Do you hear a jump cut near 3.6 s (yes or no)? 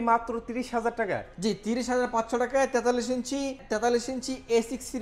yes